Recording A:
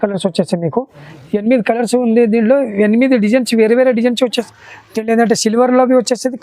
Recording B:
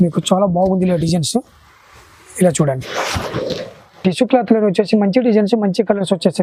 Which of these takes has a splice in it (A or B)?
A